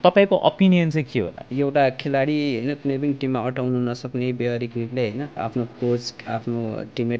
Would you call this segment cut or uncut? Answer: cut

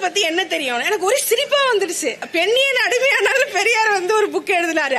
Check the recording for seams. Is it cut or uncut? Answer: cut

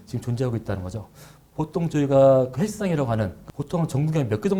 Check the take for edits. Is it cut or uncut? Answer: cut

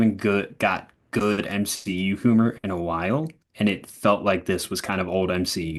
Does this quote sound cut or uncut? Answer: uncut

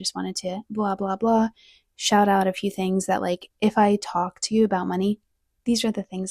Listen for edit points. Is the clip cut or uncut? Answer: uncut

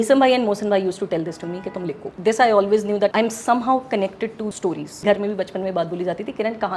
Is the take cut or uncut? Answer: cut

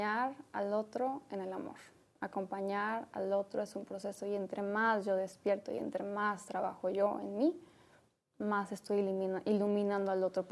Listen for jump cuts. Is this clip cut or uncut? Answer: uncut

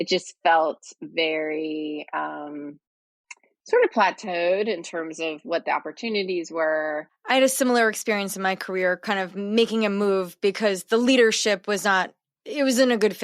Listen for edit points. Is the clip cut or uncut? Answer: cut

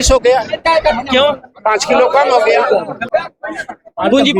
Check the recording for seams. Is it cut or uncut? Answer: cut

